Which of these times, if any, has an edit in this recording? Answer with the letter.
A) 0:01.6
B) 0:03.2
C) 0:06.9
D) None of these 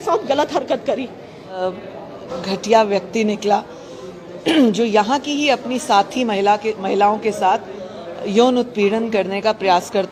A